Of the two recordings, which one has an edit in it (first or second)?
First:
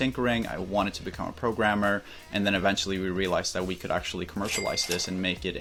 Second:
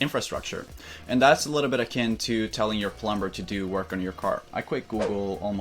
second